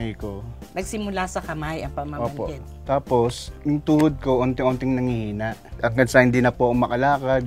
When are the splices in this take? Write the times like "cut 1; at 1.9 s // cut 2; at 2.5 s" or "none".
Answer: none